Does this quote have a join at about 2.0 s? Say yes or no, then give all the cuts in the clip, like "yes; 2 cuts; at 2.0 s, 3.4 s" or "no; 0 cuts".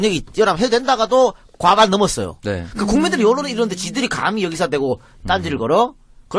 no; 1 cut; at 4.5 s